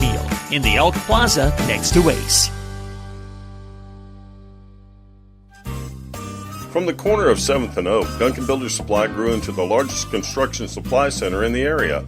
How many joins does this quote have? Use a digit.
1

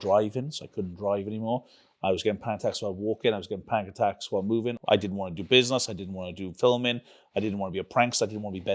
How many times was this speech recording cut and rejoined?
1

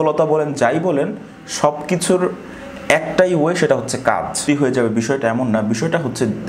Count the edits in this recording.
1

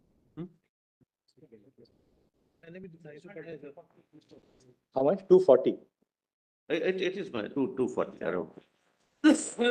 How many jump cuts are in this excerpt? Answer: 0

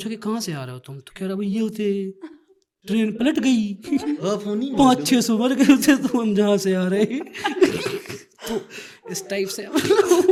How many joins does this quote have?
0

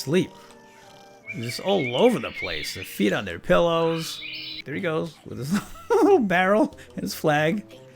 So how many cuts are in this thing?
1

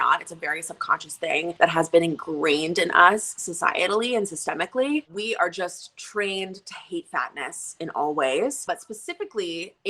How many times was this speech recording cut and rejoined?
3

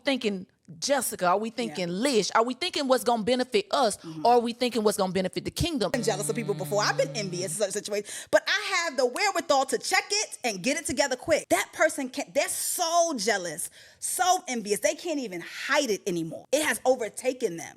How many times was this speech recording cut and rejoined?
3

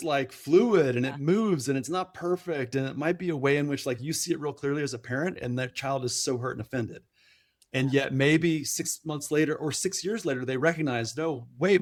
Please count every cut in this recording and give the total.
0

